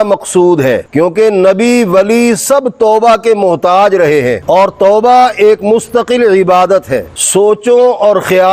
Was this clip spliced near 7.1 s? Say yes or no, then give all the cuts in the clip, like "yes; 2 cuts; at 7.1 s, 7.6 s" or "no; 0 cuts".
yes; 1 cut; at 7.1 s